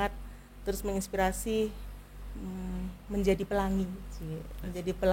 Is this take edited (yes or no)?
no